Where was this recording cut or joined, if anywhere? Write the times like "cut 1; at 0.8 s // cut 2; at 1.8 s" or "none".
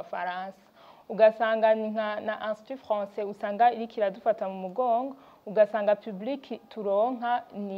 none